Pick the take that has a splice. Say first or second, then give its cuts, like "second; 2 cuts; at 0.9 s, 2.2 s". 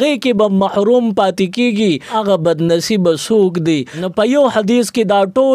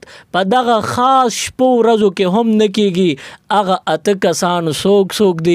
first; 2 cuts; at 2.1 s, 4.0 s